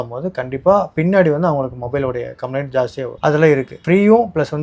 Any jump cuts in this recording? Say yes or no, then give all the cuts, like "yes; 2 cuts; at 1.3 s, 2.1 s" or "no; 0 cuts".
no; 0 cuts